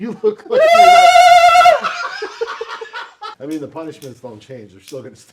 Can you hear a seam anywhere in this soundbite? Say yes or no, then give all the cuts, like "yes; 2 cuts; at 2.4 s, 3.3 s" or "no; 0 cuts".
yes; 1 cut; at 3.3 s